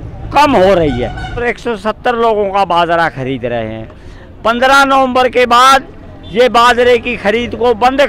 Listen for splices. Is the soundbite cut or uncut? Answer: cut